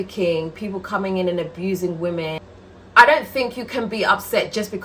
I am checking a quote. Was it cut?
yes; 1 cut; at 2.4 s

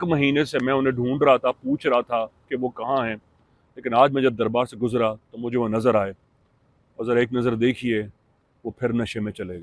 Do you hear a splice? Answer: no; 0 cuts

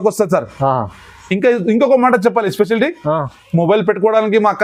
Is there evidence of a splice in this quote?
no; 0 cuts

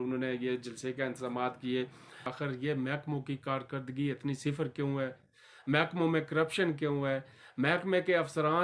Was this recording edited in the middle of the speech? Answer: yes; 1 cut; at 2.3 s

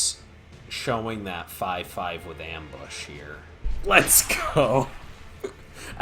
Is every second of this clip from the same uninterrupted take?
no; 1 cut; at 3.7 s

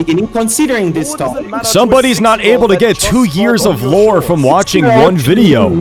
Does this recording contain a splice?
no; 0 cuts

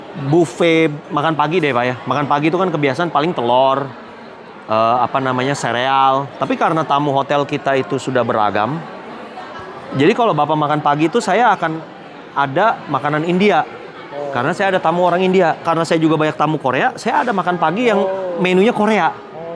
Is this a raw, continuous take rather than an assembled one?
no; 1 cut; at 1.0 s

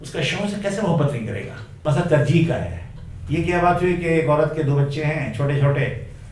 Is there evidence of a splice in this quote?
yes; 1 cut; at 1.8 s

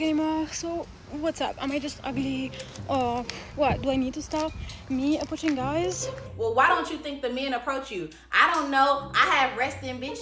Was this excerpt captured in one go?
no; 1 cut; at 6.2 s

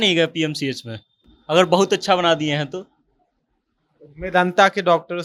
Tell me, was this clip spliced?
no; 0 cuts

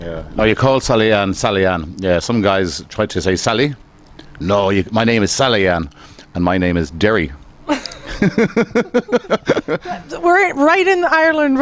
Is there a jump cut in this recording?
yes; 1 cut; at 7.5 s

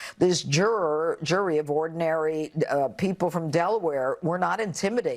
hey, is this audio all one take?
yes; 0 cuts

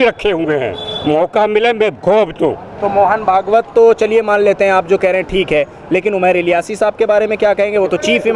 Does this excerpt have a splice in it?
no; 0 cuts

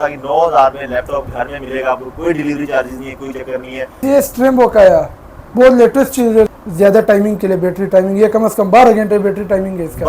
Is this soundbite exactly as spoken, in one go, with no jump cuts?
no; 2 cuts; at 4.0 s, 6.5 s

